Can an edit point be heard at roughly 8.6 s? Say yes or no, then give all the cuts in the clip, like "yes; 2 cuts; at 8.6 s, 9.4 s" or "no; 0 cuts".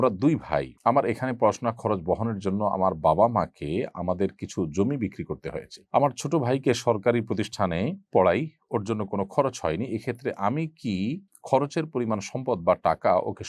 no; 0 cuts